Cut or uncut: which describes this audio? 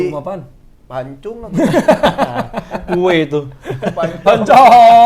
uncut